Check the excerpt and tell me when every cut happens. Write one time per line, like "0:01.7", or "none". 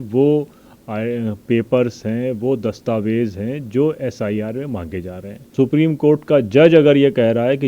0:05.4